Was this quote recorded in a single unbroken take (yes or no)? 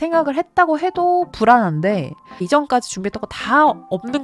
no